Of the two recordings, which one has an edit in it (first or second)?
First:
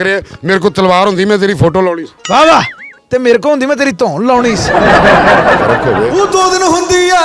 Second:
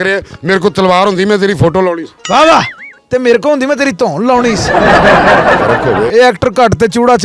second